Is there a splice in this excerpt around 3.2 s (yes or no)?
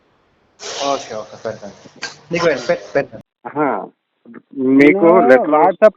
yes